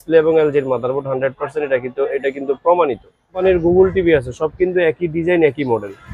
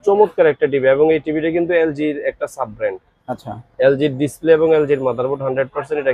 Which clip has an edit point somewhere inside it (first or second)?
first